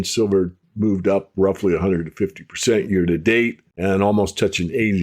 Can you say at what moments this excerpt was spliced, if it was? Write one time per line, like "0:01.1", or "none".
0:03.7